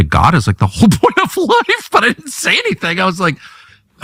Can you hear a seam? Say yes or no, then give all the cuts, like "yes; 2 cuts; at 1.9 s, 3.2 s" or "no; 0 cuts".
no; 0 cuts